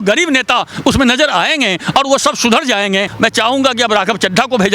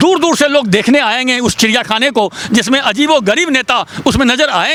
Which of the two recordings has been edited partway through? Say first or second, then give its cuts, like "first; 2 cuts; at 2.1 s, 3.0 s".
first; 1 cut; at 3.1 s